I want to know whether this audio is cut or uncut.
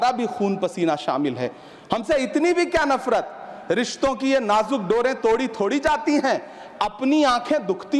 uncut